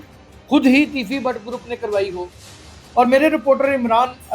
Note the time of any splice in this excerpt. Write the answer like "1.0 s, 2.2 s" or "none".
2.6 s